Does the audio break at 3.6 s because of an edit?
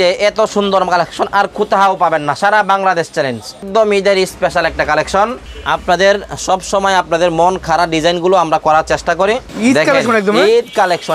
yes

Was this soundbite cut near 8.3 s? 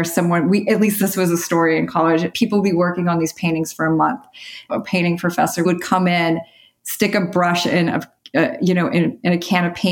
no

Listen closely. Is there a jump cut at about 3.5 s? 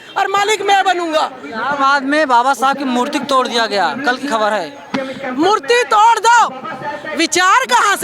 no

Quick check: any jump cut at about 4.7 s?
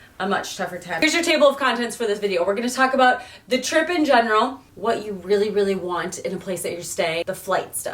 yes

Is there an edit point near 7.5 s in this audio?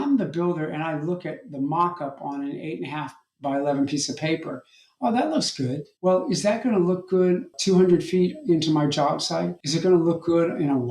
yes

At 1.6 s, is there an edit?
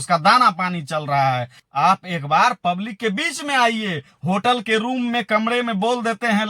yes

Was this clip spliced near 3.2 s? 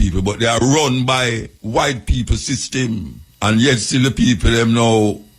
yes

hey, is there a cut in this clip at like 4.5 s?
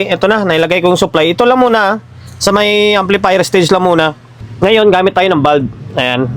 yes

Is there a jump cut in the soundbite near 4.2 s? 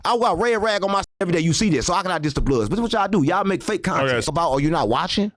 yes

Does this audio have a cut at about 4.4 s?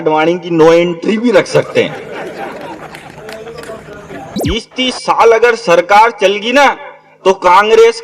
yes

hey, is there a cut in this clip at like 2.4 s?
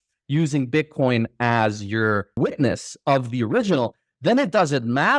yes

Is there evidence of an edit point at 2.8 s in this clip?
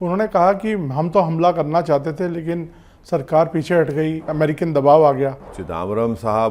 no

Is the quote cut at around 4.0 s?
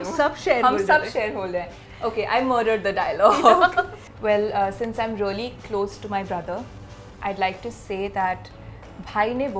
yes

